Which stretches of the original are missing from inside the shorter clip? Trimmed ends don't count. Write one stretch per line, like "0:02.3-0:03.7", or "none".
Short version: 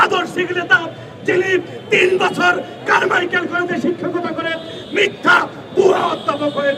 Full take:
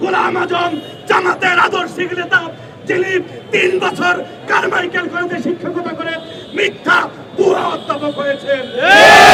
none